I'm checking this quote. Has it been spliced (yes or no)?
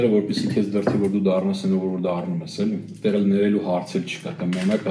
no